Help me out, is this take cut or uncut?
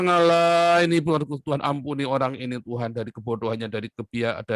uncut